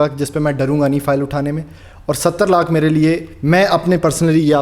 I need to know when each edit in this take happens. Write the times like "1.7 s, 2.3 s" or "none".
none